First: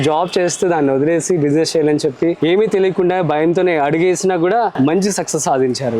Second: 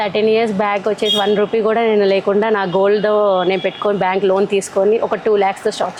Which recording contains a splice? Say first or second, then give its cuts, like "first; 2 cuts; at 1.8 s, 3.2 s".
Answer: first; 2 cuts; at 2.4 s, 4.7 s